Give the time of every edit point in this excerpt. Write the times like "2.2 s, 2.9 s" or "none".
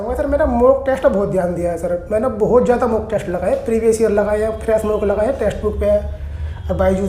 none